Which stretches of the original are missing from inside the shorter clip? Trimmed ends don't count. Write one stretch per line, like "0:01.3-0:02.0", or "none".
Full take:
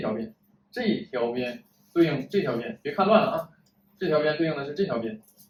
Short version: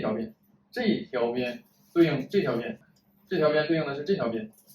0:02.8-0:03.5